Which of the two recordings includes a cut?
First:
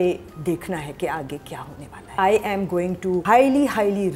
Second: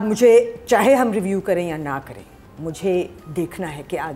first; 2 cuts; at 2.2 s, 3.2 s

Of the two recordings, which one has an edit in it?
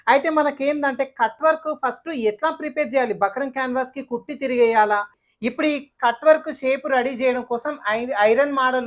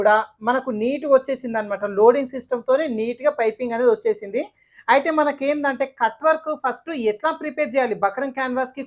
first; 1 cut; at 5.2 s

